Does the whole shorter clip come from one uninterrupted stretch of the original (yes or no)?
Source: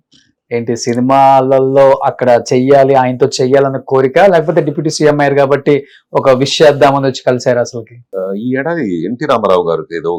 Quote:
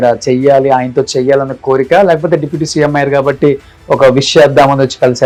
yes